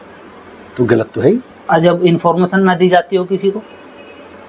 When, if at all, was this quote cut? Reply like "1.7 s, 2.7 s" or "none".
none